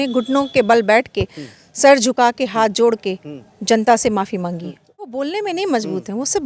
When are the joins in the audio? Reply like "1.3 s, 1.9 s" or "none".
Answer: 5.1 s